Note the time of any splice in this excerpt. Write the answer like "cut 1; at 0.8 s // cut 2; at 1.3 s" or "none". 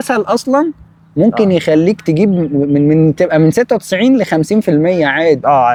none